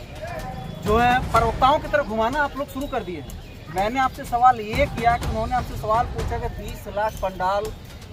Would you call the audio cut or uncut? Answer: uncut